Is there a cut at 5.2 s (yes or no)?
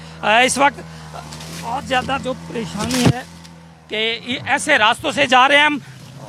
no